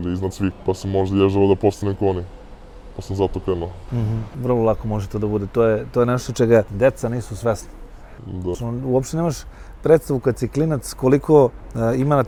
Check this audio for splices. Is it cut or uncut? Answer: uncut